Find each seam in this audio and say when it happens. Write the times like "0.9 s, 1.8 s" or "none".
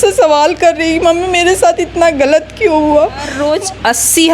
3.4 s